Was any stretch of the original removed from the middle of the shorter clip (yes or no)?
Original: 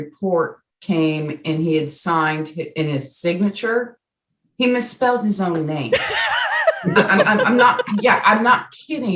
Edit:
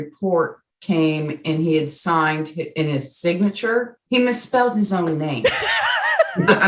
yes